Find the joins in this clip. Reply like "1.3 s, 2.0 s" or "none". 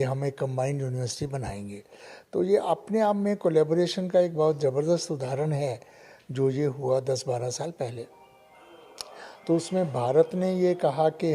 none